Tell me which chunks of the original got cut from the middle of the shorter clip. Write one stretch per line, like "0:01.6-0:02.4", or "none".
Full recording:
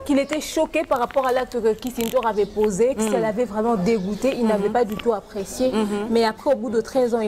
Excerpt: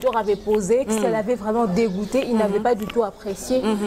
none

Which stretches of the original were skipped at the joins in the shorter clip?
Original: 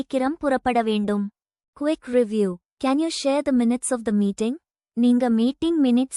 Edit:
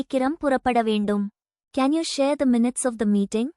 0:01.6-0:02.7

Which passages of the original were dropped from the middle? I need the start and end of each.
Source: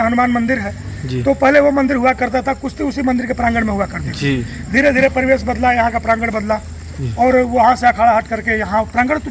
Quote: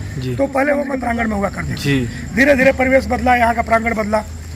0:01.8-0:03.3

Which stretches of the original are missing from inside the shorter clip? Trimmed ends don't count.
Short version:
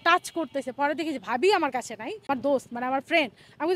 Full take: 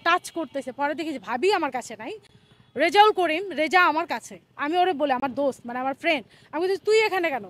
0:02.3-0:05.2

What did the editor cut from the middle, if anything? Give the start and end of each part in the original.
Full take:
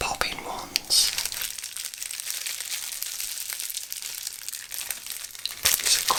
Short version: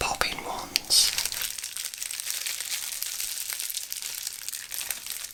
none

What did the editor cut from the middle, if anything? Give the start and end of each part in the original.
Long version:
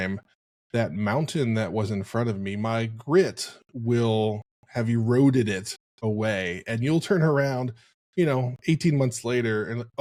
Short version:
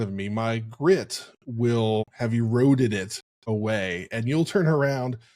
0:04.4-0:04.7

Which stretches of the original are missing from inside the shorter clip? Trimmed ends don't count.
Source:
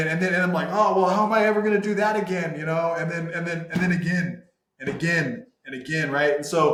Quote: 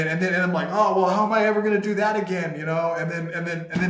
none

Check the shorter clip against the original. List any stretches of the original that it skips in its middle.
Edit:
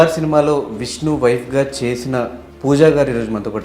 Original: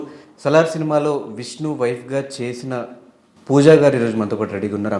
0:03.0-0:03.3

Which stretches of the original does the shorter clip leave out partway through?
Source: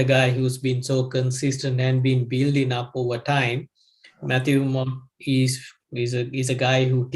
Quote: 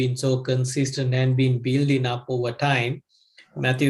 none

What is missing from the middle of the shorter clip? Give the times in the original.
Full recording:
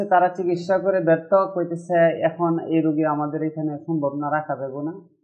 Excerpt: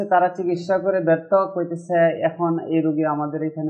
none

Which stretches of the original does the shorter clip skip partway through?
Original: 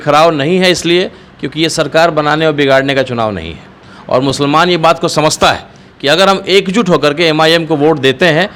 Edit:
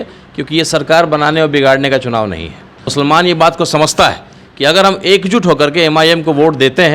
0:04.0-0:04.3

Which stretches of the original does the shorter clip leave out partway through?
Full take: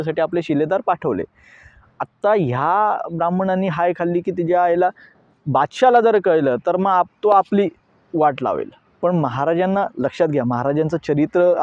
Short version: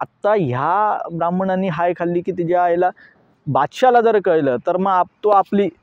none

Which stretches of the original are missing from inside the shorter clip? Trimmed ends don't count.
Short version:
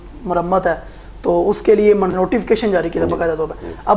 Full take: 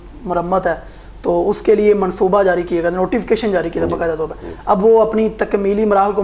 0:02.1-0:02.9

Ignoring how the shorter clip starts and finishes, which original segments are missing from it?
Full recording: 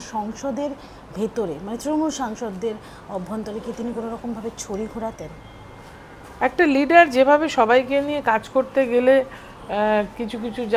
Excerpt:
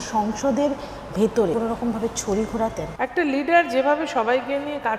0:01.5-0:04.0
0:05.3-0:06.3

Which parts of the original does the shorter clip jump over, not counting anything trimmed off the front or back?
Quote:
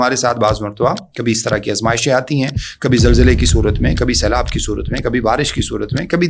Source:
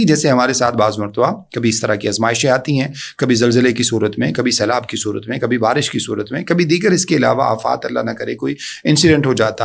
none

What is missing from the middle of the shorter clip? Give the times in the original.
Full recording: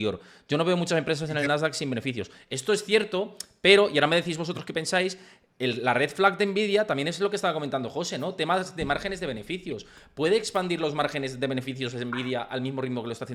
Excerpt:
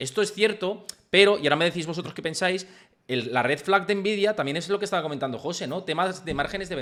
none

